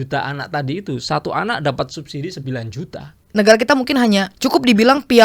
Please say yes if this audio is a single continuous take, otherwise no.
no